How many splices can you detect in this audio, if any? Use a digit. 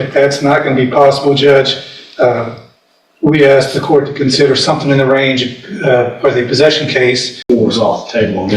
1